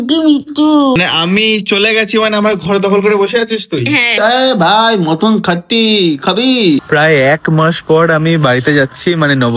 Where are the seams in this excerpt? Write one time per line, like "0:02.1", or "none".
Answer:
0:01.0
0:04.1

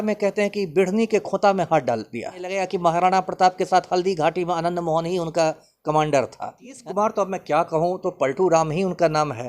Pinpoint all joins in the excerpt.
0:02.6
0:06.7

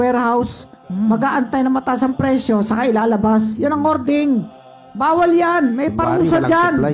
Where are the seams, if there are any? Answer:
none

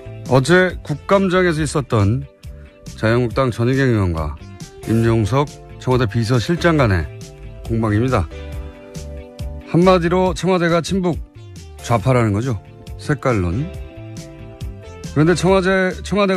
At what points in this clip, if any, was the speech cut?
none

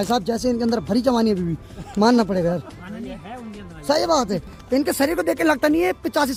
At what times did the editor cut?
none

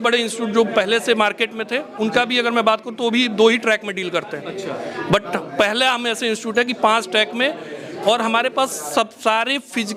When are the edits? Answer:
none

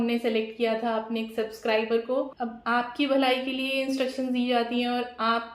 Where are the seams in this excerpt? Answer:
0:02.3

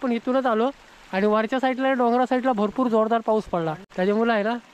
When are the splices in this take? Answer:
0:03.8

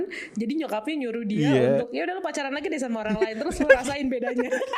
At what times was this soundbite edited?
none

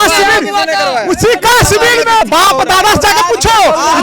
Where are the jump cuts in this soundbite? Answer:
0:02.2

